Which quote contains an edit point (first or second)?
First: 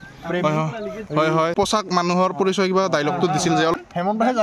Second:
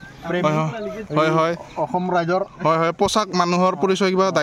first